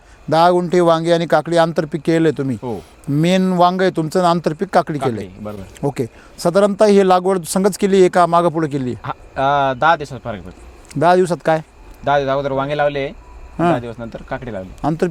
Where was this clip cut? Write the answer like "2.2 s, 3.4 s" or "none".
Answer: none

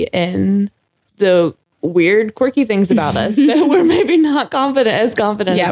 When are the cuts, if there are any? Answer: none

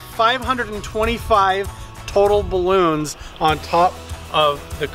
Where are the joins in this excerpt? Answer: none

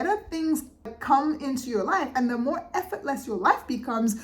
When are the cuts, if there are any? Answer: 1.0 s

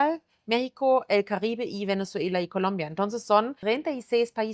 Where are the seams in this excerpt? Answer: 3.6 s

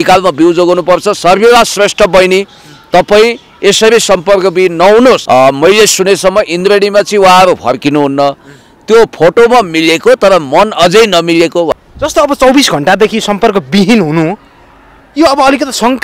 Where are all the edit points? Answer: 5.2 s, 11.7 s

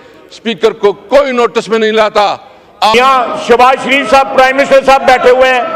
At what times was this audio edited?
2.9 s

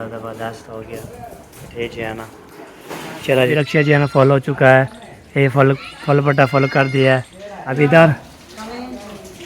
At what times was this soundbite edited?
3.5 s, 7.6 s

